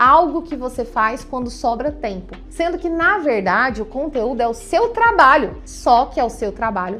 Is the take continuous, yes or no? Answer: yes